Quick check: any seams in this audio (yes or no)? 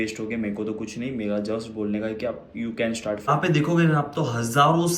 yes